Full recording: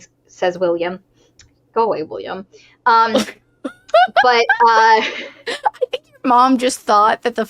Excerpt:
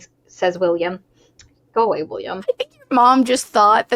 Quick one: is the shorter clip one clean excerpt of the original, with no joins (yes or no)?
no